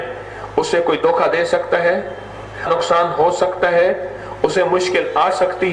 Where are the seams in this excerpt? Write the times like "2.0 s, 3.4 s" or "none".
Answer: 2.7 s